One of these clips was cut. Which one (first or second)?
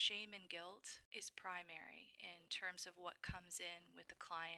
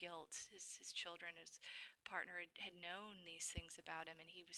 first